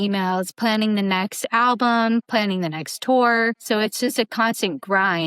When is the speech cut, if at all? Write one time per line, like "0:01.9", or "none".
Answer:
0:02.3
0:03.6